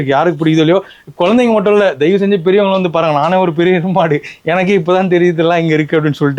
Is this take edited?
no; 0 cuts

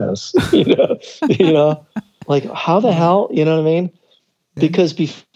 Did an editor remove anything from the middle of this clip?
no; 0 cuts

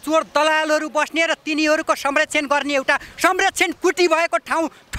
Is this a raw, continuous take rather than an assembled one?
yes; 0 cuts

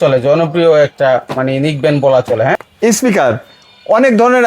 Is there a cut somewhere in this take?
yes; 1 cut; at 2.6 s

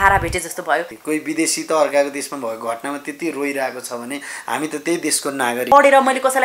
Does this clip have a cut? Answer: yes; 2 cuts; at 0.9 s, 5.7 s

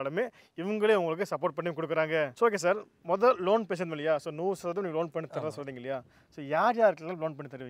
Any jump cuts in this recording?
no; 0 cuts

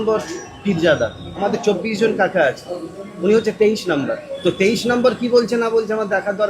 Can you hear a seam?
yes; 2 cuts; at 1.2 s, 4.3 s

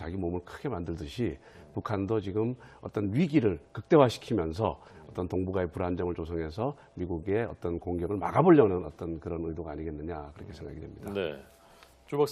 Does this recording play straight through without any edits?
no; 1 cut; at 10.3 s

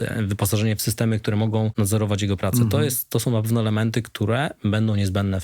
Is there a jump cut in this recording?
yes; 1 cut; at 1.7 s

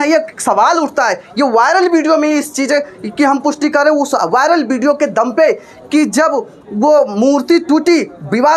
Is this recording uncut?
yes; 0 cuts

